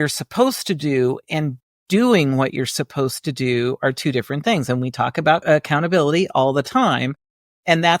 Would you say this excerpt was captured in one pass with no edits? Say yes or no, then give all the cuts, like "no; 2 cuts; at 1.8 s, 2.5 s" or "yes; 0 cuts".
no; 1 cut; at 5.4 s